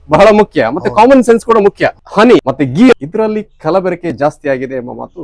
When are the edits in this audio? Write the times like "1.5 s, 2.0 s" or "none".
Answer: 2.0 s

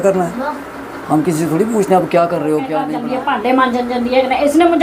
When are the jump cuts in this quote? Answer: 2.9 s

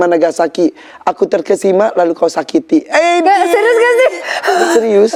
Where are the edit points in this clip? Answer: none

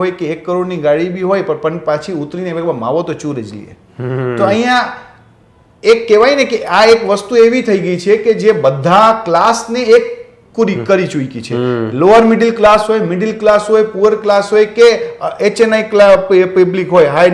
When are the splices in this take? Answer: none

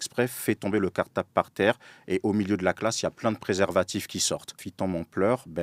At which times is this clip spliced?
4.6 s

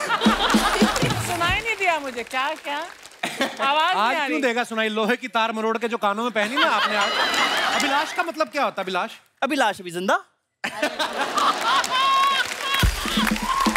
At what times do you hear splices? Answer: 1.2 s, 7.8 s

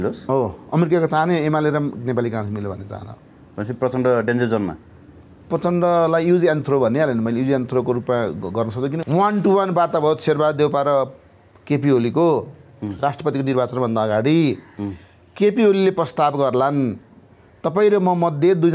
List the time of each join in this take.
9.0 s

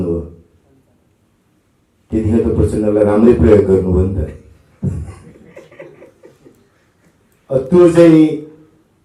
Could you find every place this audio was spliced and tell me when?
none

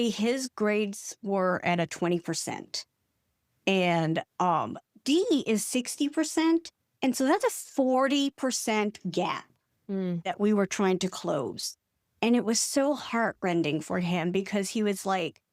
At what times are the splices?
none

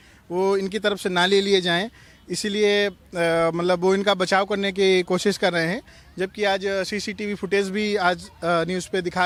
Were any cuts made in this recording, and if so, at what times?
none

